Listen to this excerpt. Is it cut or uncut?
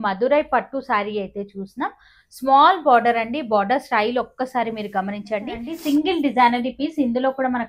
cut